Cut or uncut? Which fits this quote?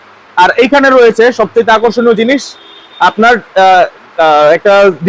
uncut